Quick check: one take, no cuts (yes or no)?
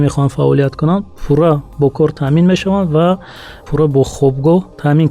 no